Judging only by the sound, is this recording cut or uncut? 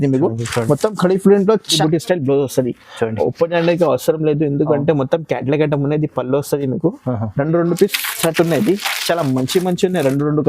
cut